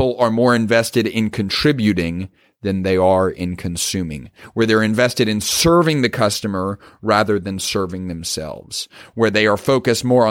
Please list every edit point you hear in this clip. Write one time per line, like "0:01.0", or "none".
none